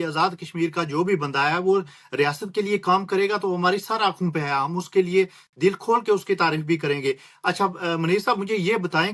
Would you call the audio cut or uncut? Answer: uncut